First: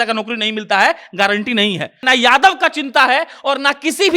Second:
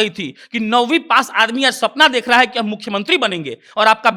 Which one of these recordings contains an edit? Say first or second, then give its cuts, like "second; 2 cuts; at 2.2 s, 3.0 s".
first; 1 cut; at 2.0 s